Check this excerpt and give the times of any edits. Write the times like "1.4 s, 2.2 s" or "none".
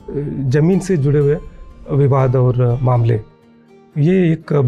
none